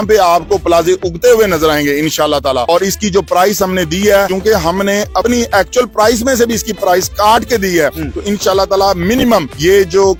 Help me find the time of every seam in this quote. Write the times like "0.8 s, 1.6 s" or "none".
none